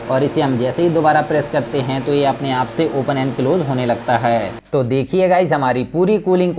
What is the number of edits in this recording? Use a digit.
1